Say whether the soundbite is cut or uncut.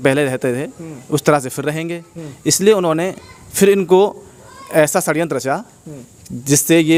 uncut